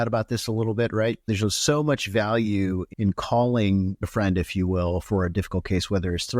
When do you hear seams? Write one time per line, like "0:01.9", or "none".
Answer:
0:01.3
0:02.9
0:04.0
0:05.0